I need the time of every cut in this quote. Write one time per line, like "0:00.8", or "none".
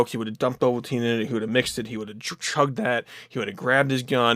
none